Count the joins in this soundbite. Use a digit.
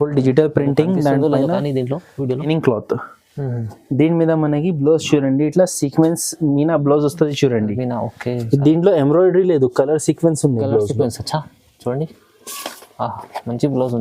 1